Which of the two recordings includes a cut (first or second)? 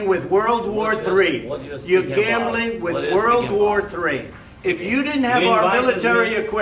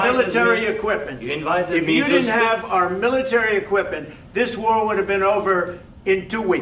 first